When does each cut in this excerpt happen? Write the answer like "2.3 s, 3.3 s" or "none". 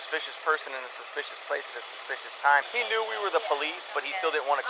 2.7 s